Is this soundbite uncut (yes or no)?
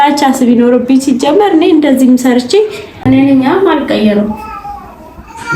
no